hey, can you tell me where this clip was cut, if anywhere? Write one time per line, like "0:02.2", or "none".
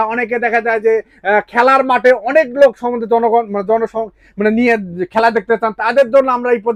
none